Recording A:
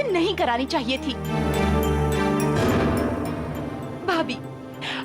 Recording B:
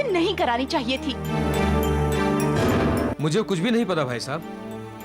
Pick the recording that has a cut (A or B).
B